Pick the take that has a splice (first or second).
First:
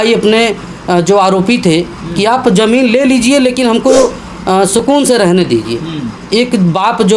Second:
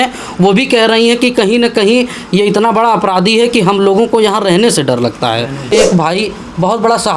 second